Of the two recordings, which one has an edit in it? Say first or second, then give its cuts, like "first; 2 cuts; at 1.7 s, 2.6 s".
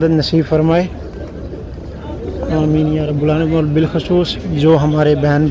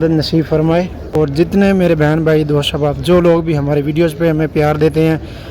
second; 1 cut; at 1.0 s